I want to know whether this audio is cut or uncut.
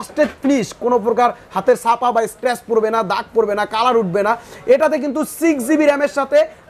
uncut